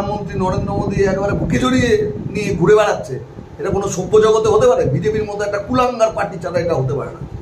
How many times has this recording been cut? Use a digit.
0